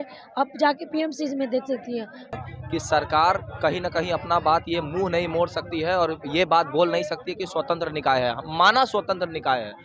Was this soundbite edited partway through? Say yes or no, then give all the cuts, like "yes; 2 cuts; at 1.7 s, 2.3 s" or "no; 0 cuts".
yes; 1 cut; at 2.3 s